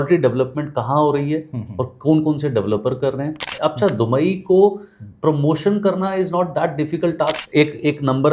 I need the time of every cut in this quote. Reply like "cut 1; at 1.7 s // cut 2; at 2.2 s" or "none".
cut 1; at 3.4 s // cut 2; at 7.4 s